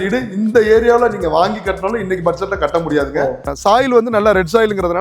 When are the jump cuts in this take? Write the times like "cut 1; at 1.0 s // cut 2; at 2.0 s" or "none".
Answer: cut 1; at 3.5 s